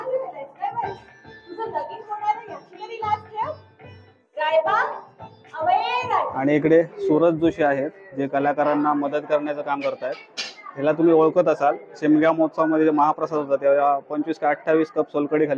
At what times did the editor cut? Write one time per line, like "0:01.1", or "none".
0:06.4